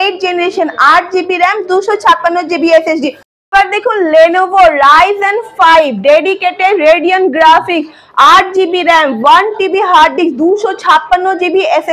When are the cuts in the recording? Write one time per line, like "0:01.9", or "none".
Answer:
0:03.5